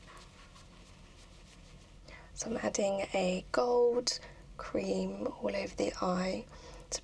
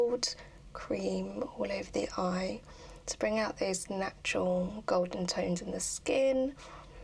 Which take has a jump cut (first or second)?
first